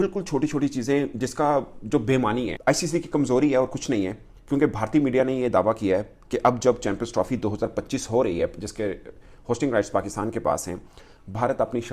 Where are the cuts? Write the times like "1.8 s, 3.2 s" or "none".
2.5 s